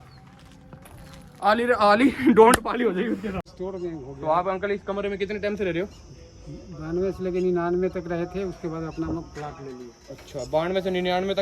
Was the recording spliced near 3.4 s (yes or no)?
yes